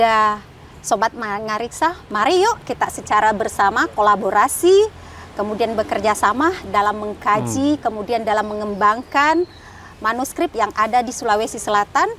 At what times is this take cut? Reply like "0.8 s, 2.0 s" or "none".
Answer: none